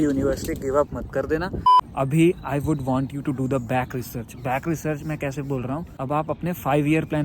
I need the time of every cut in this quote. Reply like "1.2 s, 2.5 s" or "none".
1.8 s, 5.9 s

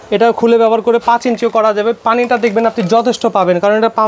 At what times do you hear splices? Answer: none

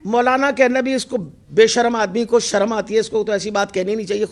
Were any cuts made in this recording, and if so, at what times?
none

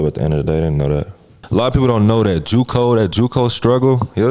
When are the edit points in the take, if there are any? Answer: 1.3 s

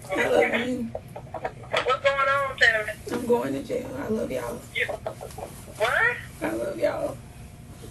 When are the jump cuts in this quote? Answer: none

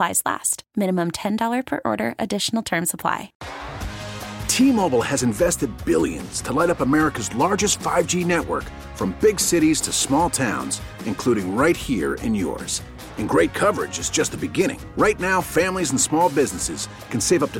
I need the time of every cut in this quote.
3.4 s

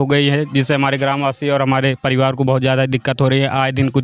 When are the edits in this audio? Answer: none

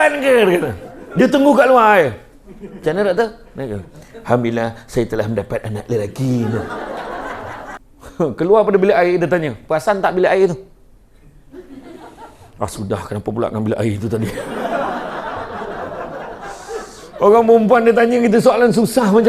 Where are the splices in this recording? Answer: 7.8 s

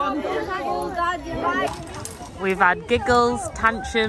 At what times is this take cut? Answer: 1.7 s

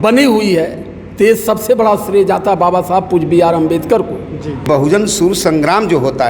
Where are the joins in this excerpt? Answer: 4.7 s

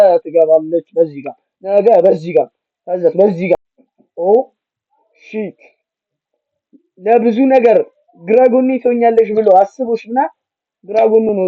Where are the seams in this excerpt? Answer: 3.8 s

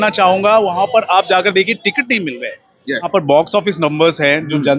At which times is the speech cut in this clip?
3.1 s

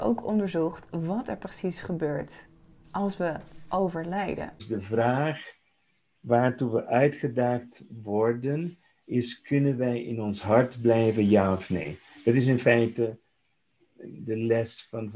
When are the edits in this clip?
4.6 s

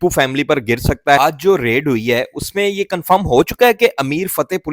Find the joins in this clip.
1.2 s

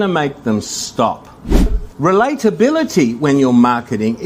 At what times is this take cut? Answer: 1.8 s

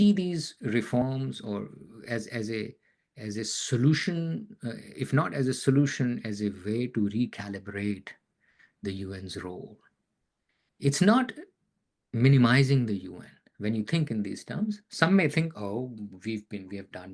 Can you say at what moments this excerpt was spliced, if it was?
none

